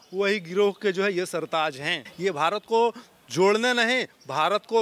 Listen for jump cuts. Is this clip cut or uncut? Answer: cut